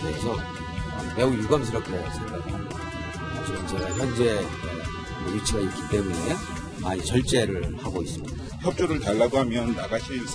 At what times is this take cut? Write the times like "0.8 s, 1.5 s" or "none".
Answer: none